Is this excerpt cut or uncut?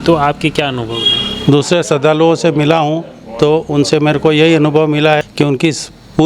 cut